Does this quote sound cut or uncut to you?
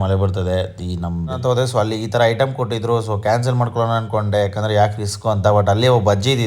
cut